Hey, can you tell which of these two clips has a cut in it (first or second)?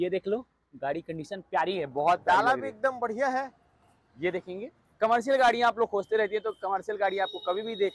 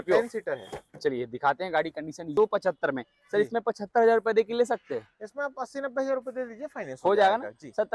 second